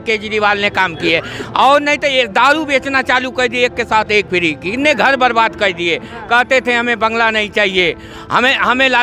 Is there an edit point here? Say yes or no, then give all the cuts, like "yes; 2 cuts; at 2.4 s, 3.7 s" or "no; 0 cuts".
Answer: no; 0 cuts